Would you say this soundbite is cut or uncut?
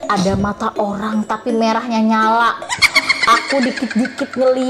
uncut